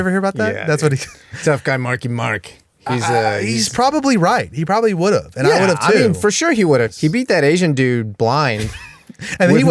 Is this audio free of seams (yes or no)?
no